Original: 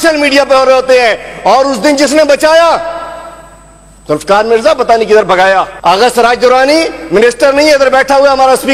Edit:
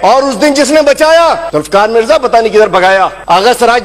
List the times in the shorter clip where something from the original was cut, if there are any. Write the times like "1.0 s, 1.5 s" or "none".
1.4 s